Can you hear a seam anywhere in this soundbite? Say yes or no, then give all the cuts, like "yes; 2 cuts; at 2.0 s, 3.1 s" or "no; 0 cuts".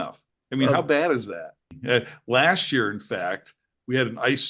yes; 1 cut; at 1.7 s